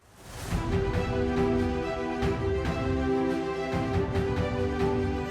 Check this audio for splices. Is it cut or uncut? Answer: uncut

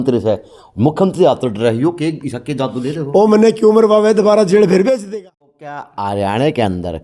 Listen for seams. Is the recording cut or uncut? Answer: cut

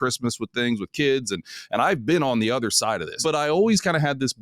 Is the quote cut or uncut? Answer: cut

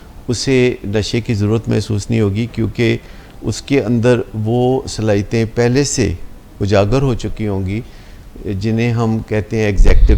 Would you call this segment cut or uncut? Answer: uncut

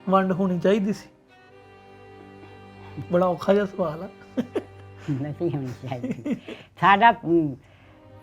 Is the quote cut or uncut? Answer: cut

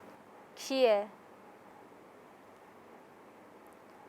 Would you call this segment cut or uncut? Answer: uncut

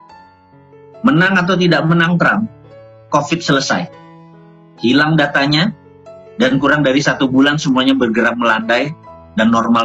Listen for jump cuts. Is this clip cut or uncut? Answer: cut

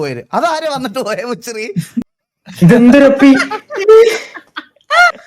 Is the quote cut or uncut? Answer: cut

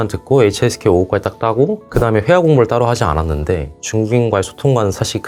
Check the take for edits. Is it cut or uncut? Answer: uncut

